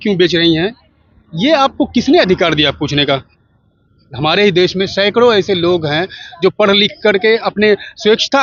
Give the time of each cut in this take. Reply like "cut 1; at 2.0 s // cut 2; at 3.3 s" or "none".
none